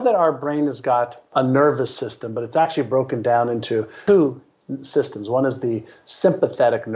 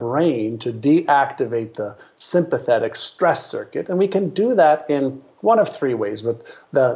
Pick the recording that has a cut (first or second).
first